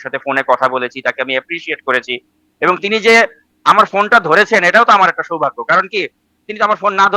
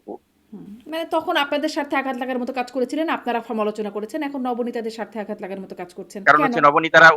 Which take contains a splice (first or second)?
second